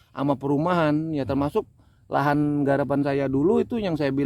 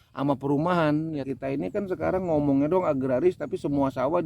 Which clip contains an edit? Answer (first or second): second